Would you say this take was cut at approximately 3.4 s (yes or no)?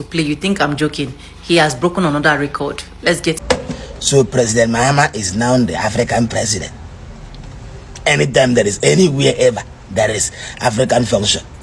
yes